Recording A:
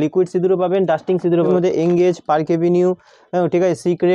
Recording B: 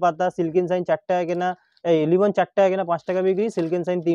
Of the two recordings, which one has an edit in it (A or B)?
A